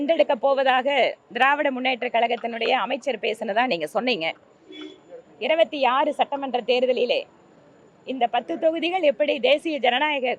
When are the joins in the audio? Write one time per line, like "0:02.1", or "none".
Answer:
none